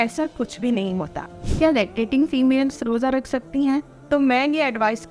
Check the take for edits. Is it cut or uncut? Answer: cut